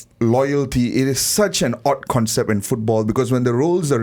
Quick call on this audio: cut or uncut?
uncut